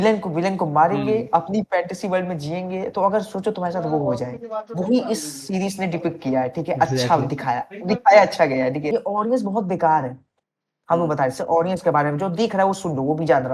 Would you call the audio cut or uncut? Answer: cut